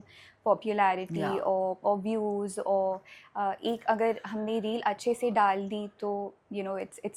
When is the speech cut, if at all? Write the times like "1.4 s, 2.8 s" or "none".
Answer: none